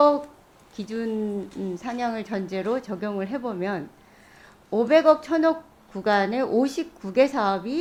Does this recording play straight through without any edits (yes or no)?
yes